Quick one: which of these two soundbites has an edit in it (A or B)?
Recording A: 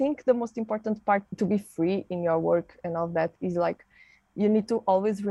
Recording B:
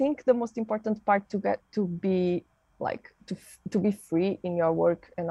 A